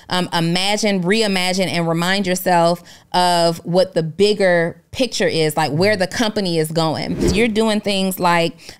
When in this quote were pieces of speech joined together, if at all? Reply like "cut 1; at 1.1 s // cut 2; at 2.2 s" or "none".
cut 1; at 7.3 s